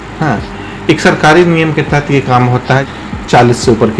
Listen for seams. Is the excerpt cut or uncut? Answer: cut